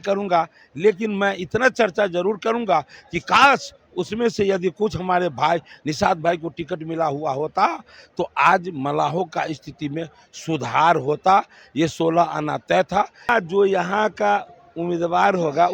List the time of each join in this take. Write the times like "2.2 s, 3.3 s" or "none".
13.3 s